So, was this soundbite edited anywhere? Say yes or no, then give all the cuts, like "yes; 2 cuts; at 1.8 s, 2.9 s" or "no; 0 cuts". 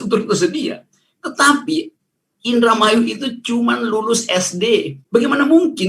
yes; 1 cut; at 5.0 s